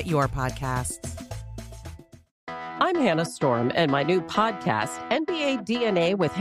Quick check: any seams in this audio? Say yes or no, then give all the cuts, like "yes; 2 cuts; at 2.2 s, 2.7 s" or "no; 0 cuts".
yes; 1 cut; at 2.5 s